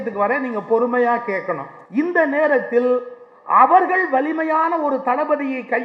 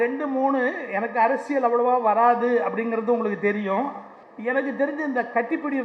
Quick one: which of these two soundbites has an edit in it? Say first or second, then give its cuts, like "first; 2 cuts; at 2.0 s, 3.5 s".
first; 1 cut; at 1.7 s